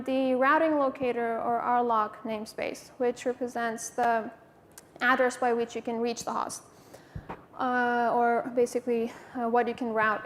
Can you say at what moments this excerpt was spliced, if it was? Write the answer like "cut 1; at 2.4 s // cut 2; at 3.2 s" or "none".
none